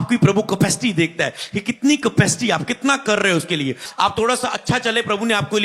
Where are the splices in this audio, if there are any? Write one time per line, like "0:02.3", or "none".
0:03.8